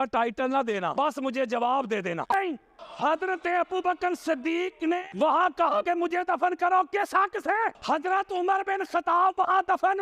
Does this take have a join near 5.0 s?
no; 1 cut; at 2.3 s

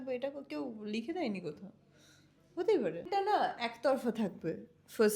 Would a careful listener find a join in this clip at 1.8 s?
no; 1 cut; at 3.1 s

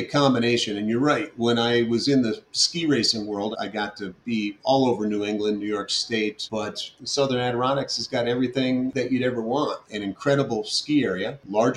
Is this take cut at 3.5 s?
yes; 3 cuts; at 3.5 s, 6.8 s, 8.9 s

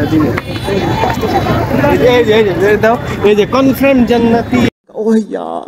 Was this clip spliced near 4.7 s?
yes; 1 cut; at 4.7 s

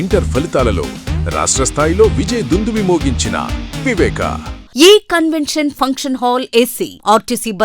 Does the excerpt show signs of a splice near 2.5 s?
no; 1 cut; at 4.6 s

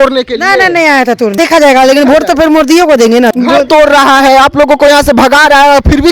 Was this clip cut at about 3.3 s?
yes; 2 cuts; at 1.4 s, 3.3 s

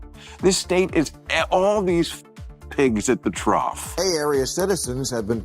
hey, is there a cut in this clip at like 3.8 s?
yes; 1 cut; at 3.8 s

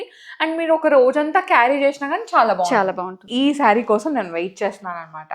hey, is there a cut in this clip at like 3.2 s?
yes; 1 cut; at 3.2 s

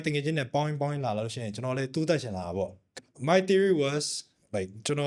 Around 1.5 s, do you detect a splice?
no; 1 cut; at 2.9 s

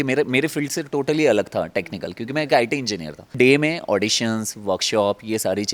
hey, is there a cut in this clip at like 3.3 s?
yes; 1 cut; at 3.3 s

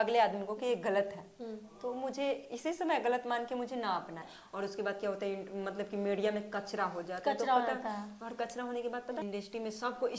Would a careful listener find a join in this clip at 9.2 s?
yes; 2 cuts; at 4.4 s, 9.2 s

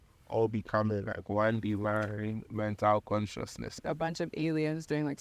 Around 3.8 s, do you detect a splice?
yes; 1 cut; at 3.8 s

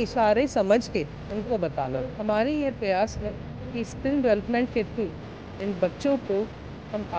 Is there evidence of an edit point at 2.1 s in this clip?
yes; 1 cut; at 2.1 s

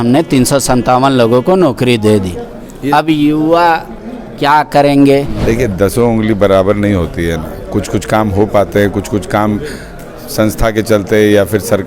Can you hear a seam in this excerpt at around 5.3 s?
yes; 1 cut; at 5.3 s

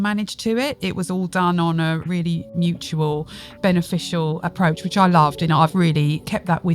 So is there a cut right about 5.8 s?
yes; 3 cuts; at 2.1 s, 4.4 s, 5.8 s

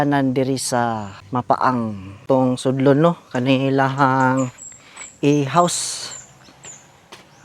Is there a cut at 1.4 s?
yes; 2 cuts; at 1.4 s, 2.1 s

